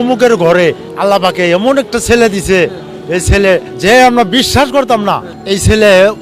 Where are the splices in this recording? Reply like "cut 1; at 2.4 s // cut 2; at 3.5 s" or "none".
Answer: cut 1; at 0.9 s // cut 2; at 3.7 s // cut 3; at 5.3 s